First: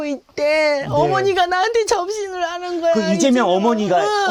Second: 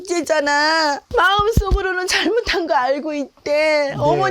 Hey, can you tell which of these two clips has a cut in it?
second; 1 cut; at 1.0 s

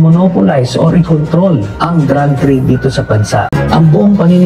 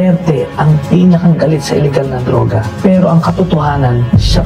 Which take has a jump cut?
first; 1 cut; at 3.5 s

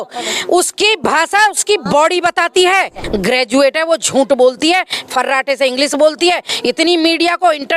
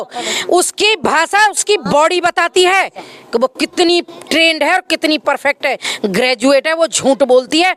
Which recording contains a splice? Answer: first; 1 cut; at 3.0 s

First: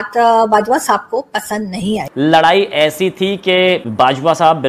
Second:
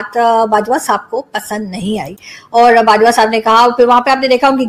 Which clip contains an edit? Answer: first; 1 cut; at 2.1 s

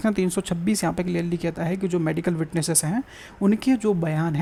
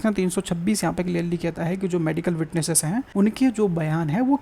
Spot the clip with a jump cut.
second; 1 cut; at 3.1 s

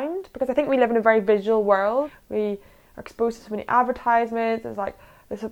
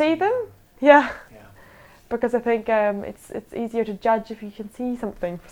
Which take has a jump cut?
first; 1 cut; at 2.1 s

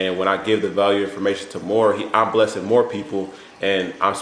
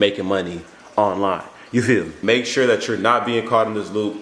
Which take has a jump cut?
second; 1 cut; at 2.1 s

